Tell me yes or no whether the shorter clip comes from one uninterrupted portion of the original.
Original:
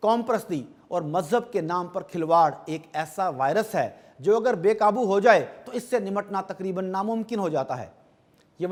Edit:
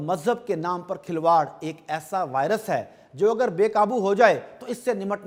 yes